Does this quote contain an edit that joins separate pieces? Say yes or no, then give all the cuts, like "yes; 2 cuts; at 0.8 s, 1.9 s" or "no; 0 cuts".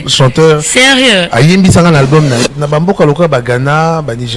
yes; 1 cut; at 2.4 s